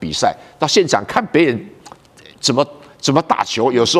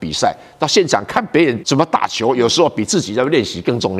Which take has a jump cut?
second; 1 cut; at 1.6 s

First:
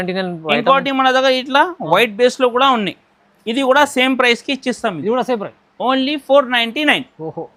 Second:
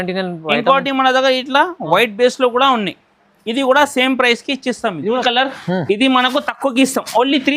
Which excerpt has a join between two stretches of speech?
second; 1 cut; at 5.2 s

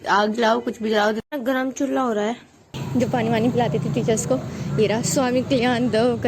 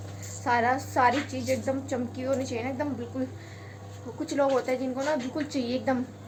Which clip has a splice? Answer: first; 1 cut; at 2.8 s

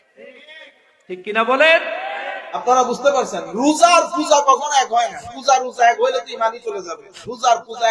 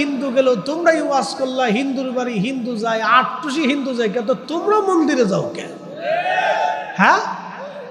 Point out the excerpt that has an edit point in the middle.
first; 1 cut; at 2.6 s

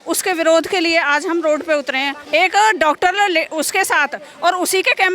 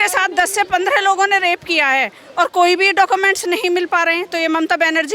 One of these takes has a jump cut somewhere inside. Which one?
first; 1 cut; at 2.2 s

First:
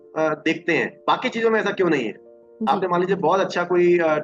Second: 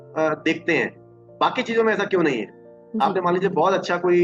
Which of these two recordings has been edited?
first; 1 cut; at 0.9 s

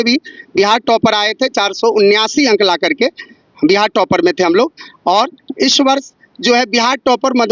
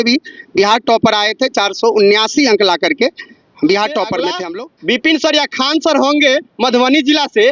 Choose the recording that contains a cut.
second; 1 cut; at 4.4 s

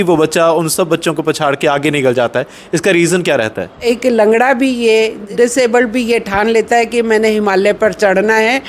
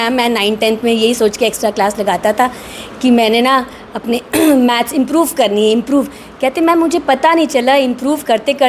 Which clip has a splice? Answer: first; 2 cuts; at 3.8 s, 5.2 s

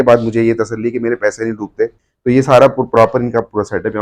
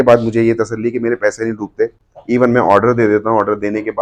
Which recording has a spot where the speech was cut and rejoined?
first; 1 cut; at 2.1 s

